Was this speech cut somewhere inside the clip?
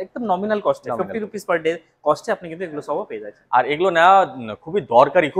no; 0 cuts

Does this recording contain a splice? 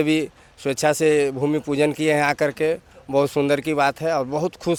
no; 0 cuts

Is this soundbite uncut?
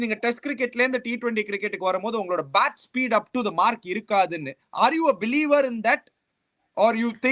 yes; 0 cuts

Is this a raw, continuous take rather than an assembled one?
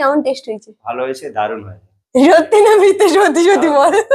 yes; 0 cuts

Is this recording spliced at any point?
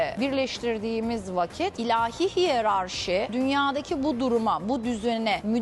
no; 0 cuts

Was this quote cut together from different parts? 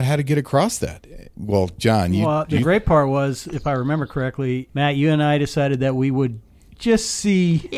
yes; 3 cuts; at 1.3 s, 2.2 s, 4.7 s

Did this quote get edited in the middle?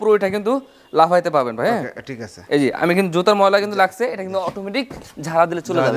no; 0 cuts

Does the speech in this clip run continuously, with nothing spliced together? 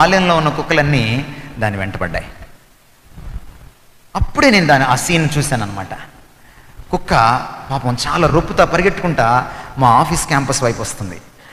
yes; 0 cuts

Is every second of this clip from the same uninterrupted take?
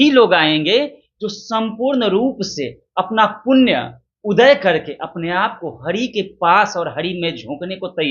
yes; 0 cuts

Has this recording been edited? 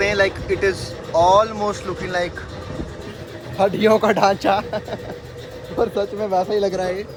no; 0 cuts

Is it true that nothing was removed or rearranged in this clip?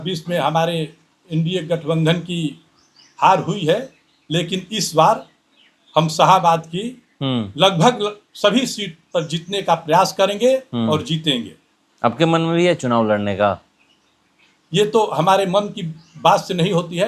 yes; 0 cuts

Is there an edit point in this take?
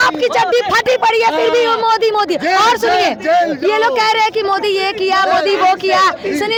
no; 0 cuts

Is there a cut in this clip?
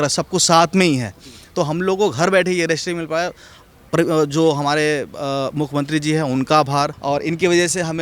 yes; 1 cut; at 7.0 s

